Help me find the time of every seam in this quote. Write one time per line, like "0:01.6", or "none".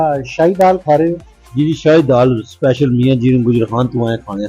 none

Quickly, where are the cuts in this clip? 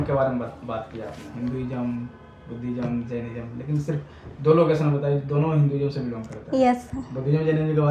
none

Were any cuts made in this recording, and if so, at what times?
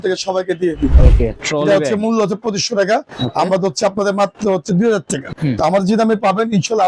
0:00.9
0:05.3

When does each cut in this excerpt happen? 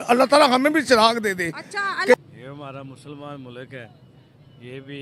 0:02.1

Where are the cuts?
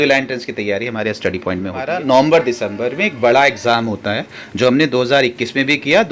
0:01.9

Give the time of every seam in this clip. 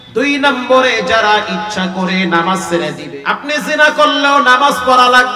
0:03.0

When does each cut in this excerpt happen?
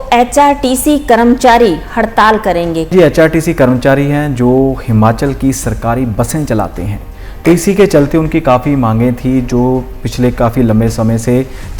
0:02.9

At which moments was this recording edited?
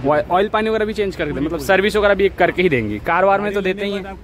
none

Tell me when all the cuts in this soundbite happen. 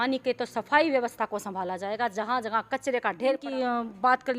0:03.5

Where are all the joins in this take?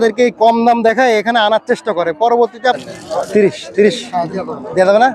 0:02.8

